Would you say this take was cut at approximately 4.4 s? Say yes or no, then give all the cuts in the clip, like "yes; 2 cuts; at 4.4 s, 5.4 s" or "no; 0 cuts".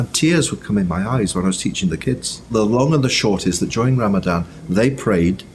no; 1 cut; at 2.4 s